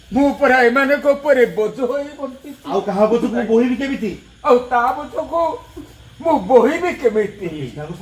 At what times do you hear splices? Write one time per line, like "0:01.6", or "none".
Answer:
none